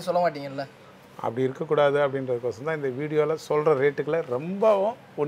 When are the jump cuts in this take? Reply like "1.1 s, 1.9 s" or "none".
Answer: none